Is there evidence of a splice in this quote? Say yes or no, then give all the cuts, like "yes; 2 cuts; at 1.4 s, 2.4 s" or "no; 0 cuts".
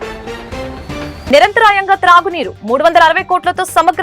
yes; 1 cut; at 1.2 s